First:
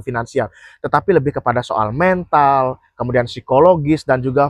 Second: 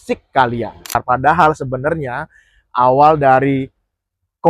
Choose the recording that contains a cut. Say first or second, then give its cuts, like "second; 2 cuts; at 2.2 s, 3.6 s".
second; 1 cut; at 1.0 s